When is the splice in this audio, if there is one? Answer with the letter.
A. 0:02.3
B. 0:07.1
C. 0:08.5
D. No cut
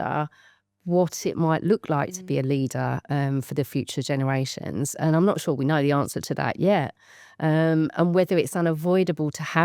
D